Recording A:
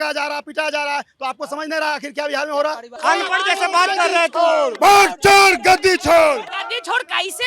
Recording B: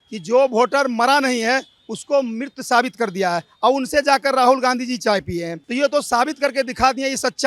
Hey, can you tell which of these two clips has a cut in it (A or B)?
A